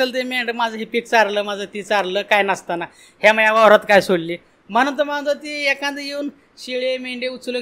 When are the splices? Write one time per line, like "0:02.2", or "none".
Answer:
none